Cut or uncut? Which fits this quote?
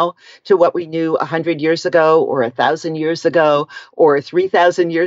uncut